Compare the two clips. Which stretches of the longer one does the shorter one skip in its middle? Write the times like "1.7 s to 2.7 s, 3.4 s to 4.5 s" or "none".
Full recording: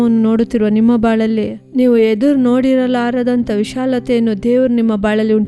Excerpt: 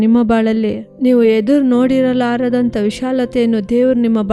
none